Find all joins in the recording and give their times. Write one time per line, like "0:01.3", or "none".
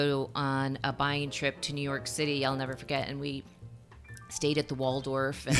none